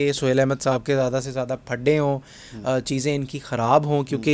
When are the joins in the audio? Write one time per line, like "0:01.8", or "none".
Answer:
none